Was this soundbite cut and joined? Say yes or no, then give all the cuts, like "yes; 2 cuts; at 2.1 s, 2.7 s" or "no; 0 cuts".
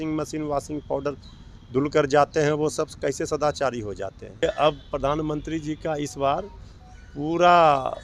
yes; 1 cut; at 4.4 s